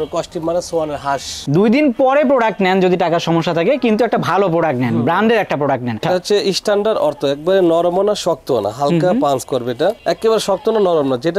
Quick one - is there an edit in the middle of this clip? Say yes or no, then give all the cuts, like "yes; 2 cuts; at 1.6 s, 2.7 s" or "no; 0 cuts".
yes; 2 cuts; at 1.3 s, 6.0 s